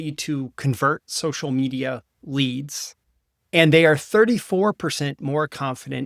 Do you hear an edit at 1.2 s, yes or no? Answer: no